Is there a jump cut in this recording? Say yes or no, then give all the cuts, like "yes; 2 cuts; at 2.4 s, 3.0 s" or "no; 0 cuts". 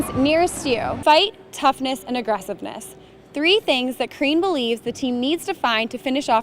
yes; 1 cut; at 0.9 s